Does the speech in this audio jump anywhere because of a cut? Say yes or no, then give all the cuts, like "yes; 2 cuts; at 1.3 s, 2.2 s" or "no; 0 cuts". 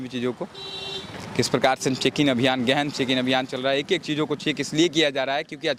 no; 0 cuts